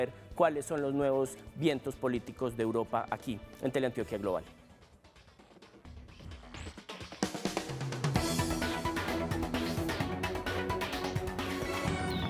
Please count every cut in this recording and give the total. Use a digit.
1